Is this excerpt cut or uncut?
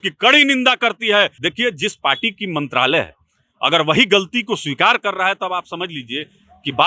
cut